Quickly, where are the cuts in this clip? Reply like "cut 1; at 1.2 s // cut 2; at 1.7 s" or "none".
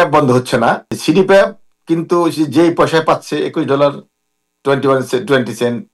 cut 1; at 0.9 s